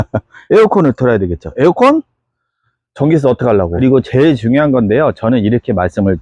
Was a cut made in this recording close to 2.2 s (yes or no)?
no